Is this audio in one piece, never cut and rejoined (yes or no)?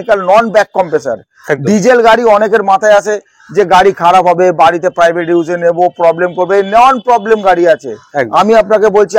yes